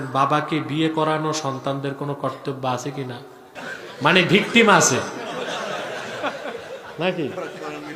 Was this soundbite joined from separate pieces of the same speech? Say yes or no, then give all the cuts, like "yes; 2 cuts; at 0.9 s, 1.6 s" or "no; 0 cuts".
yes; 1 cut; at 3.7 s